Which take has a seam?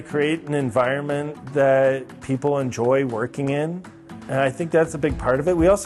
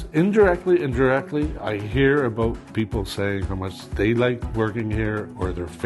second; 2 cuts; at 3.8 s, 4.4 s

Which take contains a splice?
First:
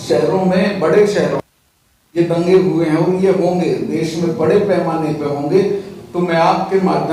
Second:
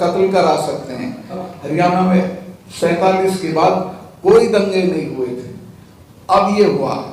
second; 1 cut; at 1.4 s

